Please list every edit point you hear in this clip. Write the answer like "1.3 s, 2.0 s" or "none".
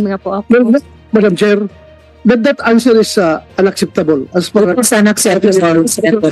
none